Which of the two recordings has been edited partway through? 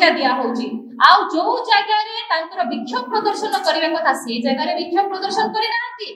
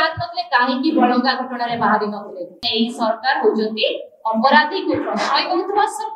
second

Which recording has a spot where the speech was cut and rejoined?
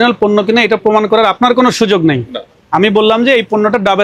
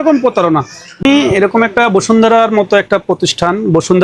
second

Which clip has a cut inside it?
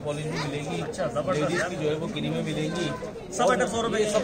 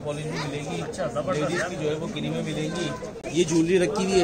second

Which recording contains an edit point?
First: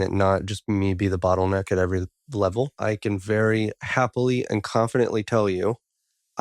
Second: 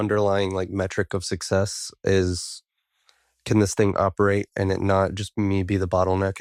first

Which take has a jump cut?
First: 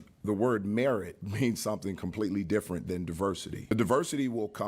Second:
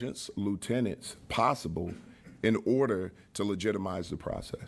first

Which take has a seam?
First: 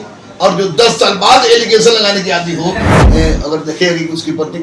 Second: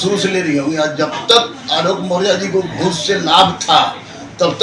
first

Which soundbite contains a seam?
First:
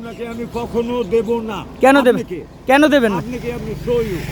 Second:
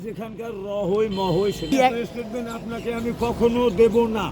second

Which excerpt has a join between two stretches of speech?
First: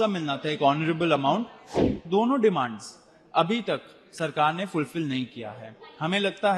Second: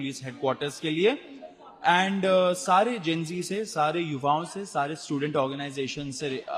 first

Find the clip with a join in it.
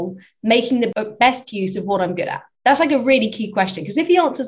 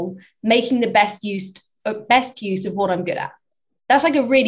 first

